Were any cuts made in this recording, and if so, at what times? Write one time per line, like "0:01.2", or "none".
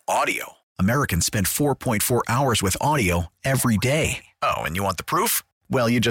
none